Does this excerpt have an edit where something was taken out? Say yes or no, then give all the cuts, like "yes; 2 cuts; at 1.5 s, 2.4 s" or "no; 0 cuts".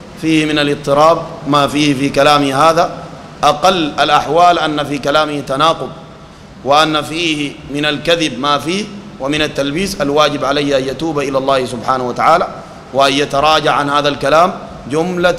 no; 0 cuts